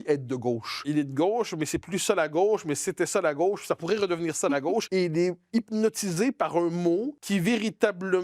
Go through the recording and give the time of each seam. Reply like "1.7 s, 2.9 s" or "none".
0.8 s, 4.9 s, 7.2 s

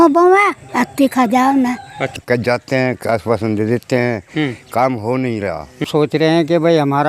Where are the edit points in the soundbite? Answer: 2.0 s, 5.8 s

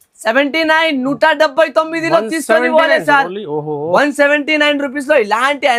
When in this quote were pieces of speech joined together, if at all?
none

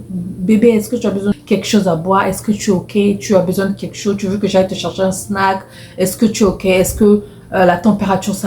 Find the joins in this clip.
1.3 s

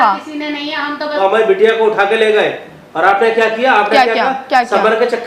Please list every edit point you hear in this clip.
1.2 s

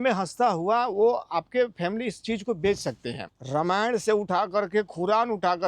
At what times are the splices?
3.1 s

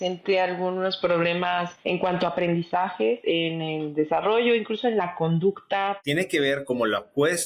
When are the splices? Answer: 3.2 s, 6.0 s

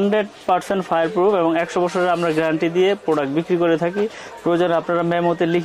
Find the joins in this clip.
none

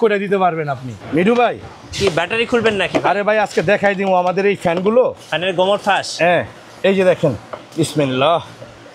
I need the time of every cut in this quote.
0.9 s

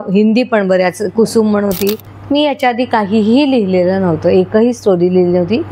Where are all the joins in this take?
2.1 s

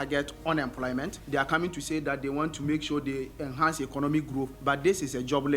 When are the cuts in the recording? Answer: 1.2 s, 4.5 s

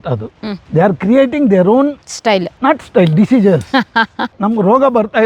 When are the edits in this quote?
4.3 s

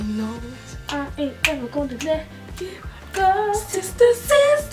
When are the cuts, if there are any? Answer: none

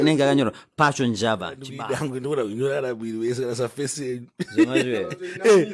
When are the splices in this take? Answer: 1.7 s

